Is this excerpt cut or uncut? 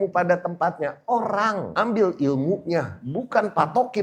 cut